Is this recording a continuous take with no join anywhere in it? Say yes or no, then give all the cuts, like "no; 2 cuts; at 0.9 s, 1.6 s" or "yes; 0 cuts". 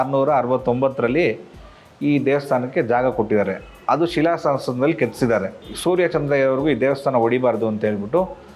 no; 1 cut; at 5.6 s